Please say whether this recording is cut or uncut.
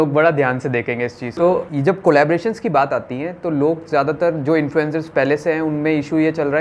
uncut